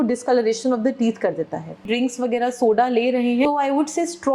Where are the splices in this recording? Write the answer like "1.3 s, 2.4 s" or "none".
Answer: 1.9 s, 3.5 s